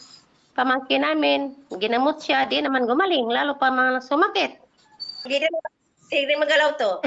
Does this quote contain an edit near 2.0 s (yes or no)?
no